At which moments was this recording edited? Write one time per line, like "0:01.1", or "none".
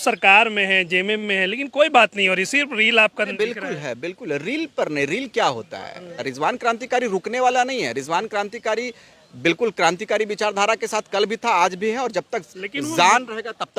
0:06.3